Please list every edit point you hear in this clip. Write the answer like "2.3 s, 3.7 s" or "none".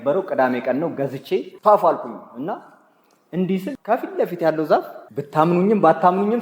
1.5 s